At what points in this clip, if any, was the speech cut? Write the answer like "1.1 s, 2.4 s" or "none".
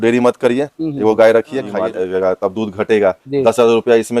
1.7 s

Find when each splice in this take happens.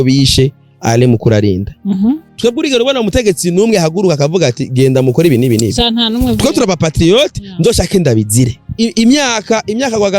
2.3 s, 8.6 s

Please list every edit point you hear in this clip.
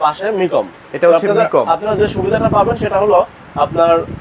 none

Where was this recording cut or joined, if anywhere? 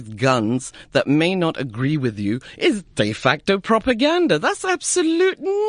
none

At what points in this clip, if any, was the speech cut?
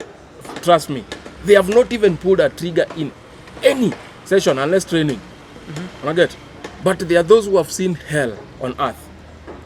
none

